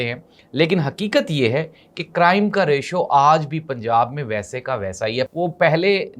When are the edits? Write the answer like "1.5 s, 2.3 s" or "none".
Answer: 5.3 s